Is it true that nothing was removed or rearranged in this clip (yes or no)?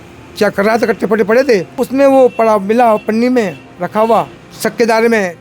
no